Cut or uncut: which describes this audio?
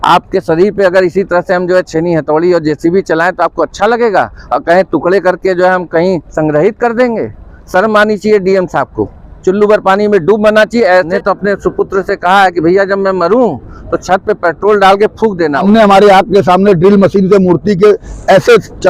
cut